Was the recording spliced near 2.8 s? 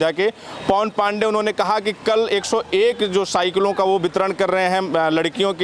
no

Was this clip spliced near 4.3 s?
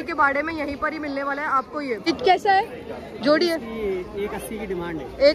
no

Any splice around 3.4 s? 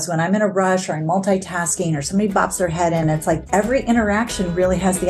yes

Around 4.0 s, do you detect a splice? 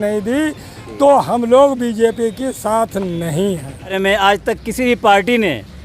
yes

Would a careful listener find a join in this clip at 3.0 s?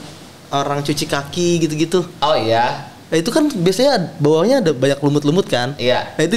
no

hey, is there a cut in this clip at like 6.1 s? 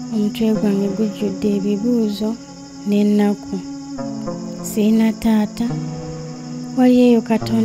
no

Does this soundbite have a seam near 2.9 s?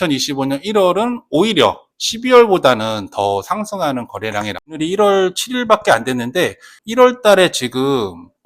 no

